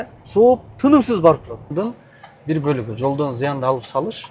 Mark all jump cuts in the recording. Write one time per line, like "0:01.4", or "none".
0:01.7